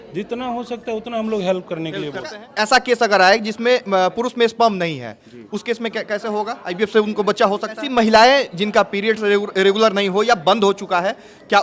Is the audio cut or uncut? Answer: cut